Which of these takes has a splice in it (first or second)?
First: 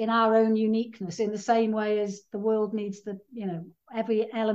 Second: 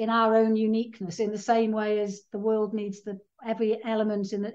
second